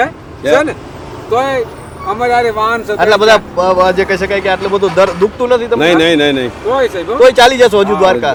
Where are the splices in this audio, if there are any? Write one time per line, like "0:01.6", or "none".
none